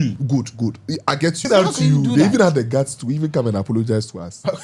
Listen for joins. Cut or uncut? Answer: cut